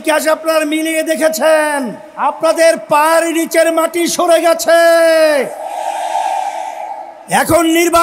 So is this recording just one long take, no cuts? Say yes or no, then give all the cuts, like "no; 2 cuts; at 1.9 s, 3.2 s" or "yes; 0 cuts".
no; 1 cut; at 2.0 s